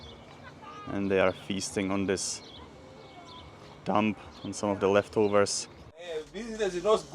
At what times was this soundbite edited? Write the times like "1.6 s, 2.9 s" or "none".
6.1 s